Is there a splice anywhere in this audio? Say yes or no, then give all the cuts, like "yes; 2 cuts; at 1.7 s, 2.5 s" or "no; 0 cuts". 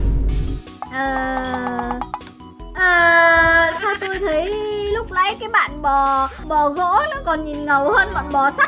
no; 0 cuts